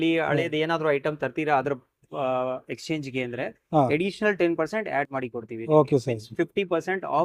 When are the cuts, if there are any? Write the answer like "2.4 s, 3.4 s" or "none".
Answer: none